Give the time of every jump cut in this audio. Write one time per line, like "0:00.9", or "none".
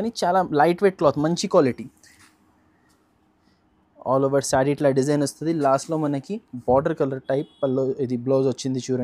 none